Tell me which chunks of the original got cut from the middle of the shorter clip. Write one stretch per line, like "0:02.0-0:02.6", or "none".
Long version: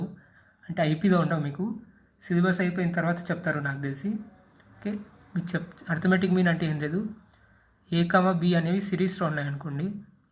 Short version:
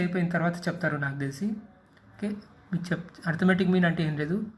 none